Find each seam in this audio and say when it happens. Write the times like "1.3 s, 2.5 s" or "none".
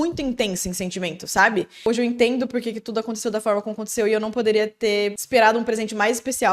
1.9 s, 5.2 s